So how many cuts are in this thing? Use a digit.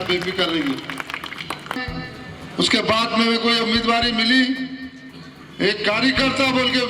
1